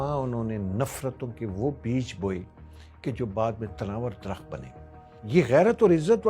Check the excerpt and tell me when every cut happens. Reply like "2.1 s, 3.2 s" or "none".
5.2 s